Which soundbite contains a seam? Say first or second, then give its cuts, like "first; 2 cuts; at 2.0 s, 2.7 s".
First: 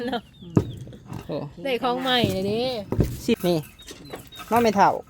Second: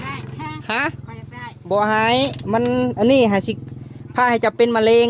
first; 1 cut; at 3.4 s